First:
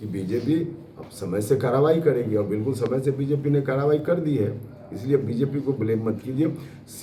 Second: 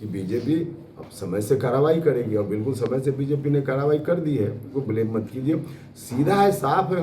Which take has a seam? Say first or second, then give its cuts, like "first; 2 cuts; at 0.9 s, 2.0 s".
second; 1 cut; at 4.7 s